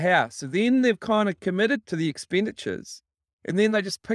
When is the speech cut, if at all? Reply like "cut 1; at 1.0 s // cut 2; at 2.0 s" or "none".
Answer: cut 1; at 1.8 s